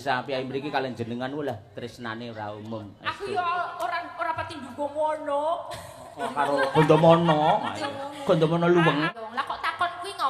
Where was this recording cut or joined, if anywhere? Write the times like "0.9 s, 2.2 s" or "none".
9.2 s